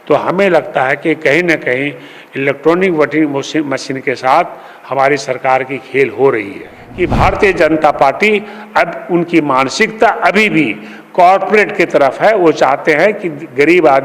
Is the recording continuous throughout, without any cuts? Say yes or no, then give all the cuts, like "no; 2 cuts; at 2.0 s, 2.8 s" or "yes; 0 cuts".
no; 1 cut; at 6.8 s